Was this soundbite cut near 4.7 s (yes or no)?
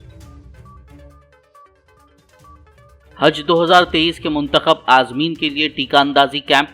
no